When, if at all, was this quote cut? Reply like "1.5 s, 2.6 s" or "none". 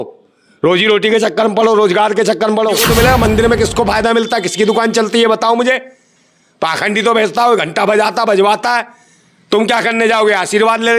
2.9 s